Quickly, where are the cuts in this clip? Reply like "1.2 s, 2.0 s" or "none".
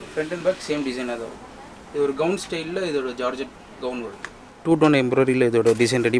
4.6 s